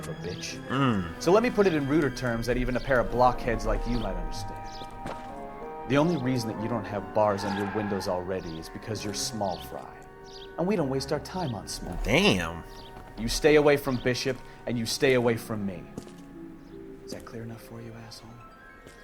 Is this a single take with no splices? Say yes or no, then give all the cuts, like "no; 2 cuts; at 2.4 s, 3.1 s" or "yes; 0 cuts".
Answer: yes; 0 cuts